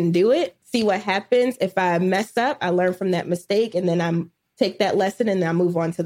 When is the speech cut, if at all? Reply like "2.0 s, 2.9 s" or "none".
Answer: none

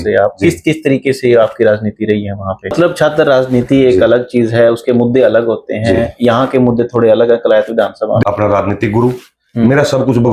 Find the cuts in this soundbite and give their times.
2.7 s, 8.2 s

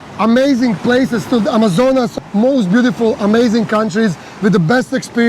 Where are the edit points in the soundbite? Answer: 2.1 s

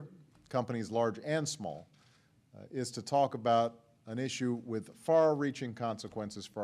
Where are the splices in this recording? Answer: 1.2 s

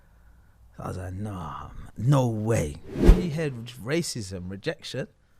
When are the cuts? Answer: 3.1 s

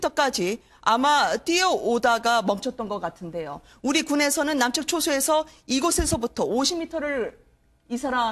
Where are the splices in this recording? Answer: none

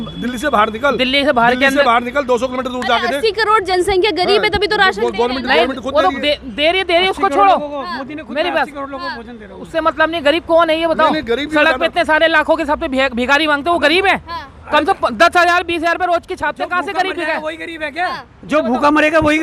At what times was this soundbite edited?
none

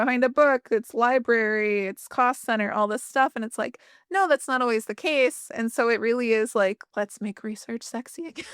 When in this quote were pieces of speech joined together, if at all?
6.8 s

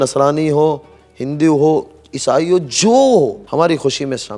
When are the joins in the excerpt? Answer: 3.4 s

